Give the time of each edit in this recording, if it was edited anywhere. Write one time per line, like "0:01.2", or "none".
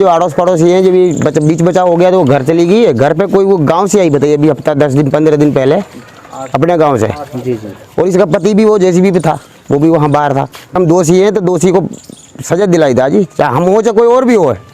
0:10.8